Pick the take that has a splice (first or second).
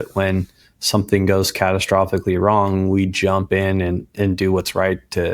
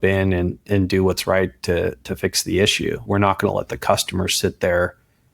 second